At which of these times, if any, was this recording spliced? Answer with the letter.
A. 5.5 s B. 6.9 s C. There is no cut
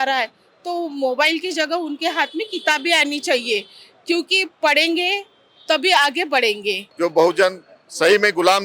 B